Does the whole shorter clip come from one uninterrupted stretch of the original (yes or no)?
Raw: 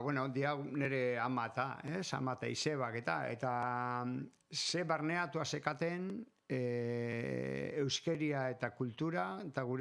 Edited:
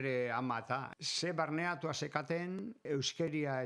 no